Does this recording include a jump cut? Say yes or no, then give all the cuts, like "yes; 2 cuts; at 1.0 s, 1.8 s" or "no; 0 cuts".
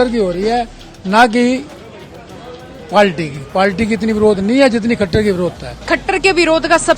yes; 1 cut; at 5.7 s